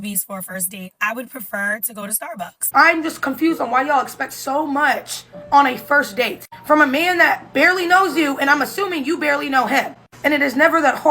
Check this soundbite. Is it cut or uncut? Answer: cut